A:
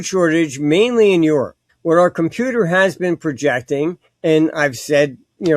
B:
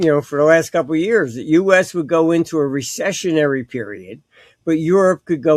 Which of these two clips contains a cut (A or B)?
A